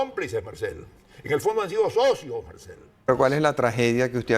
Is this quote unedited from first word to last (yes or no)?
no